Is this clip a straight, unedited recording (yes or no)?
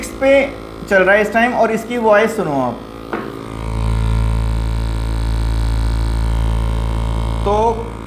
yes